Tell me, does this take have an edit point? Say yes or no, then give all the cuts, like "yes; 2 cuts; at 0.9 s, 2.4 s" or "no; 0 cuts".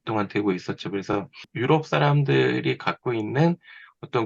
yes; 1 cut; at 1.5 s